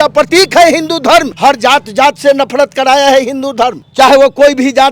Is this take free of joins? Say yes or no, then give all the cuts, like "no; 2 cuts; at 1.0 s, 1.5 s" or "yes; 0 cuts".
no; 2 cuts; at 1.3 s, 3.8 s